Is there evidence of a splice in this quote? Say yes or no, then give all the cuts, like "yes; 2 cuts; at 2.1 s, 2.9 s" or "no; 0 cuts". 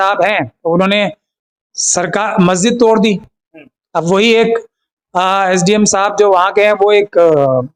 no; 0 cuts